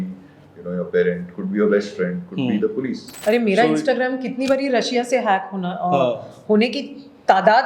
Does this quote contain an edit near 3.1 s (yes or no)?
yes